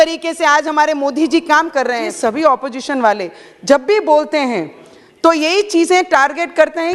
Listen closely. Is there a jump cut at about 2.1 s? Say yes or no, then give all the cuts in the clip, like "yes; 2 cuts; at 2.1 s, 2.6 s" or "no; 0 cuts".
yes; 1 cut; at 2.1 s